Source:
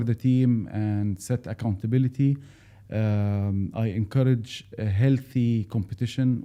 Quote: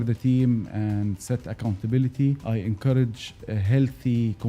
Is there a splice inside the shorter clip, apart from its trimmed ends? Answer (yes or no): yes